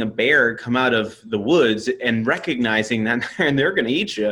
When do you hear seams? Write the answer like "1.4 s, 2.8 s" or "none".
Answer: none